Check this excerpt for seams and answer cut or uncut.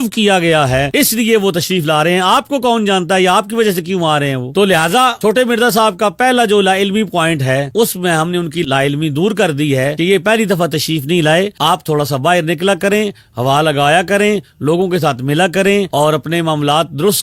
uncut